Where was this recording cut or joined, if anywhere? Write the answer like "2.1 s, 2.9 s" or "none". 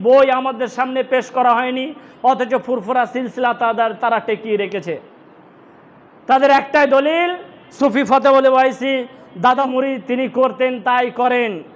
9.7 s